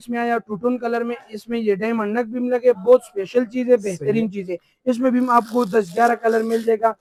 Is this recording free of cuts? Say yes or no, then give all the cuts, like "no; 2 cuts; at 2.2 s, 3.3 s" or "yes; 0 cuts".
yes; 0 cuts